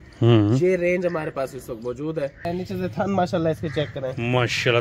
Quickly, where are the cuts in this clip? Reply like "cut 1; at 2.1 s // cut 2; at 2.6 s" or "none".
cut 1; at 2.4 s